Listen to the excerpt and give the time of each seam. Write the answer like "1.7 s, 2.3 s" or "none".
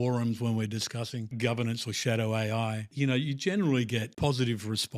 1.3 s, 2.9 s, 4.1 s